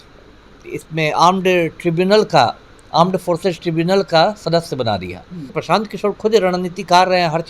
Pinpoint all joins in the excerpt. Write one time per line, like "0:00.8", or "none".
0:05.5